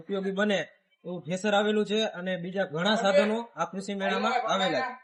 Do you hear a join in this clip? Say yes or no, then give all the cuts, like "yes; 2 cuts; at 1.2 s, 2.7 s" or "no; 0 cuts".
no; 0 cuts